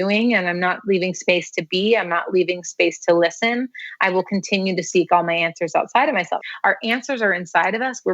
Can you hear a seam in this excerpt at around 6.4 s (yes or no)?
yes